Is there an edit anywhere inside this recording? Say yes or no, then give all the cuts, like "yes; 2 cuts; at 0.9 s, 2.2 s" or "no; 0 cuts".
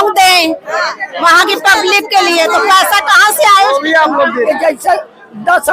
yes; 1 cut; at 4.5 s